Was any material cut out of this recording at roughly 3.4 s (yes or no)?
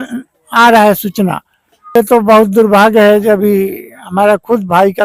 no